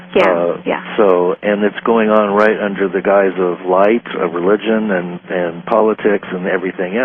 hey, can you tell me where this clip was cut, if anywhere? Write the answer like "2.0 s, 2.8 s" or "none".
2.5 s